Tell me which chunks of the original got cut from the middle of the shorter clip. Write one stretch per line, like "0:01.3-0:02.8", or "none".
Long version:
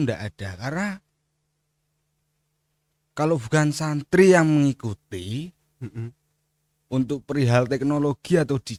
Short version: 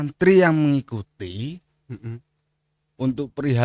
none